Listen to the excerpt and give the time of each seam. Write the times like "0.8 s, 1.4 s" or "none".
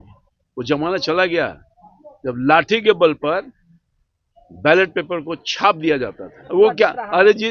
6.3 s